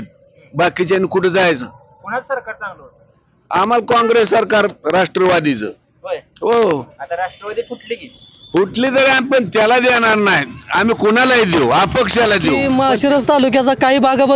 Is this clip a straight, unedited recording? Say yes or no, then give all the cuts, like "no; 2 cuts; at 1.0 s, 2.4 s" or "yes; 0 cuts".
no; 1 cut; at 12.6 s